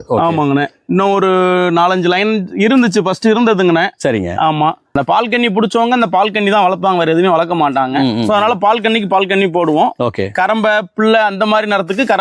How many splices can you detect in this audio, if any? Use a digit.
1